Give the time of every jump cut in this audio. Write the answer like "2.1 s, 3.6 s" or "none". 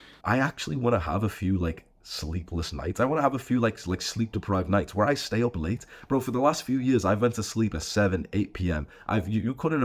none

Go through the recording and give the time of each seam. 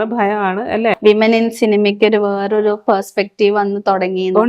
1.0 s

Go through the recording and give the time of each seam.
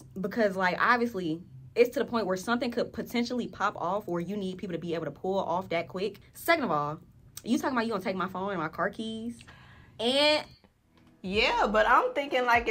6.3 s

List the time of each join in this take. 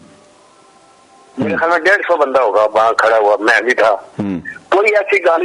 none

